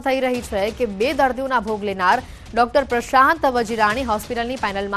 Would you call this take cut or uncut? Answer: uncut